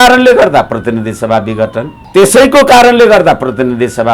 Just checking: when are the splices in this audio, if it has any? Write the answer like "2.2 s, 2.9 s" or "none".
2.0 s